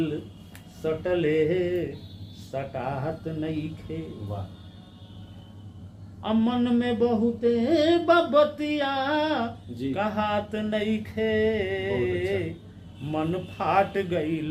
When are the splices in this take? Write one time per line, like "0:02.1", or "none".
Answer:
none